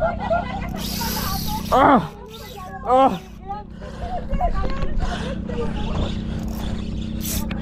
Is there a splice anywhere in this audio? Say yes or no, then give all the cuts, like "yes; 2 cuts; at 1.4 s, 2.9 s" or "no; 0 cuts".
no; 0 cuts